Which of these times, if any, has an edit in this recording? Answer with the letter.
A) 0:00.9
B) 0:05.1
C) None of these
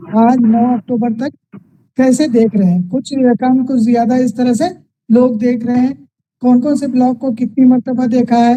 C